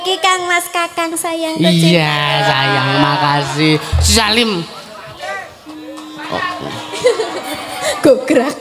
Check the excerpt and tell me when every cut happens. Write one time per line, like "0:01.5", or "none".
none